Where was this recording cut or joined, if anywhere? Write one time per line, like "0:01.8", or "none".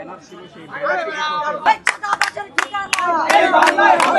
0:01.7